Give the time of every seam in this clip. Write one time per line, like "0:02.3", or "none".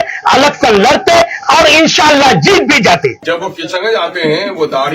0:03.2

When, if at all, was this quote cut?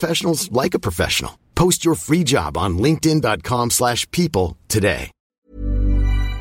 0:05.5

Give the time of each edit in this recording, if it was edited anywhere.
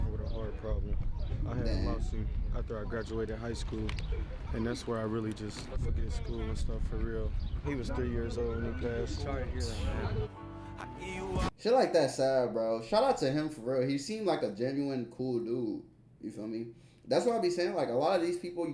none

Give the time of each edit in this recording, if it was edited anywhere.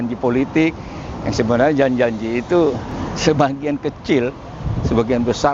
0:02.9

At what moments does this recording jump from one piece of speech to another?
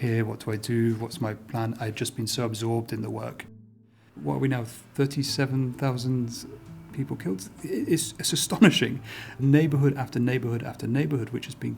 0:04.0
0:09.4

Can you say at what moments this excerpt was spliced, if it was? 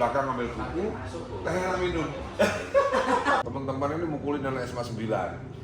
0:03.4

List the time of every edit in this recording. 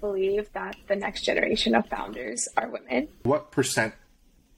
0:03.2

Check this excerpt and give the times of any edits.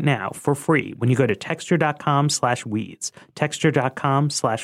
none

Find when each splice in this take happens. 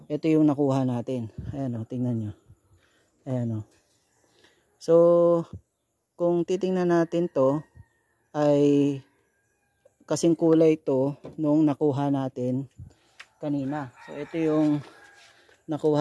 none

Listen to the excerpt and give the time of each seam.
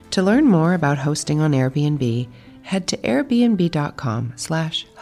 none

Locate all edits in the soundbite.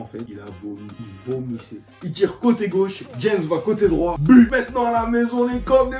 0:01.9
0:04.5

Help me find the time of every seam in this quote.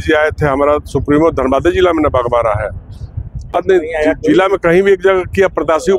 none

